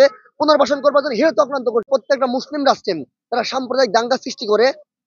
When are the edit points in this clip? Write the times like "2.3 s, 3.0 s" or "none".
1.9 s